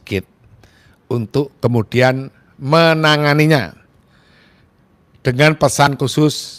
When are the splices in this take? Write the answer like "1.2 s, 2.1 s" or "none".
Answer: none